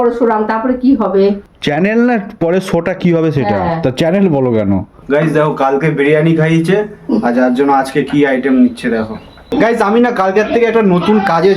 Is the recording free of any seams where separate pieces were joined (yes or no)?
no